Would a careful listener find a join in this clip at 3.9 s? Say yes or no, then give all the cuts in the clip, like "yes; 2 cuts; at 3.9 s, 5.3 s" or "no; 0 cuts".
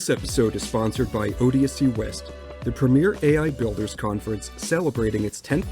no; 1 cut; at 1.9 s